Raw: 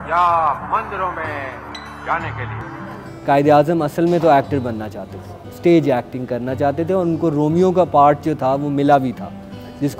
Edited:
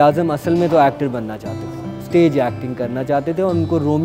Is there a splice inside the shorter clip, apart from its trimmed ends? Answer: no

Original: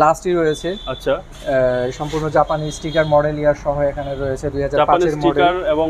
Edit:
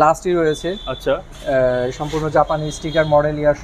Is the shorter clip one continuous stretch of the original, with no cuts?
yes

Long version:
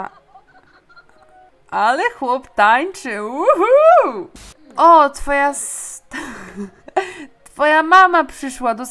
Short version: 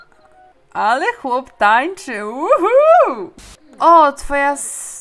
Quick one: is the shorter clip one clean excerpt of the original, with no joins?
yes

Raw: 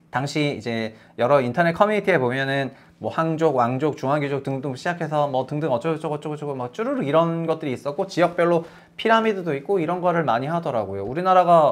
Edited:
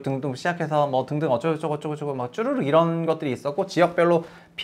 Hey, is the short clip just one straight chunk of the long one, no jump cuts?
yes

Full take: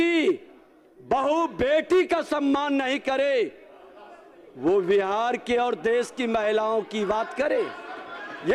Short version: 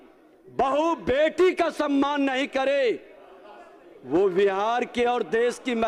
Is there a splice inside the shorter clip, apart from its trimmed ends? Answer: no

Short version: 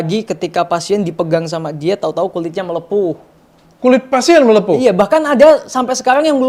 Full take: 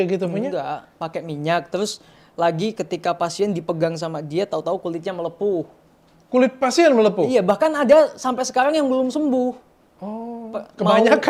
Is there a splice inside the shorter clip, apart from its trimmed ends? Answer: no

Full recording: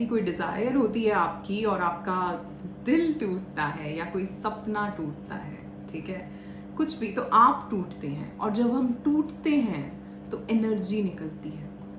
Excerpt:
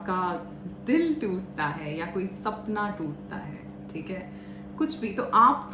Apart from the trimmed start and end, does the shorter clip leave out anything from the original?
no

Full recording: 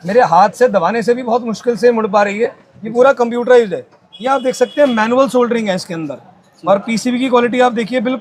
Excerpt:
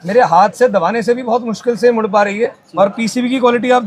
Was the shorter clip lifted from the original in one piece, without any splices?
no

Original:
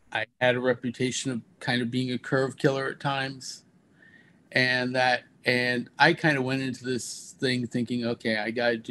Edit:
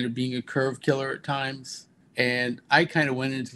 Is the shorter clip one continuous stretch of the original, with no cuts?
no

